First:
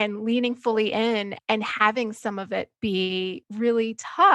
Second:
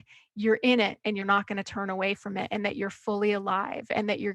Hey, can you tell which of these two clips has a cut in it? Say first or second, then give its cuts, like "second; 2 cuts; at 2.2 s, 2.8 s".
first; 2 cuts; at 1.3 s, 3.4 s